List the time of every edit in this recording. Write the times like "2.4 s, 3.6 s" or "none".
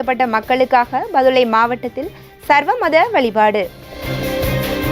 4.0 s